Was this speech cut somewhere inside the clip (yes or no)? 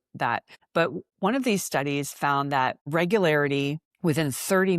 yes